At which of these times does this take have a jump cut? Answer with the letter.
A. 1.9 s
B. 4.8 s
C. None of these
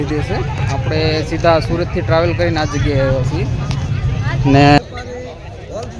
B